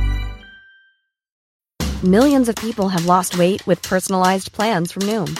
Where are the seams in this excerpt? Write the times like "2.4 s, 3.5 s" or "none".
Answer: 1.4 s